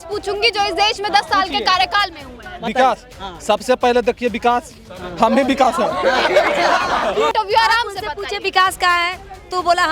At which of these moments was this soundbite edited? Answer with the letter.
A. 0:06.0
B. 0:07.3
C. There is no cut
B